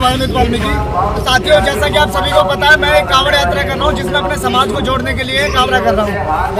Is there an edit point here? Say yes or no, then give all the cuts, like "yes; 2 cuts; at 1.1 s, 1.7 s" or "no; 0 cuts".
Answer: no; 0 cuts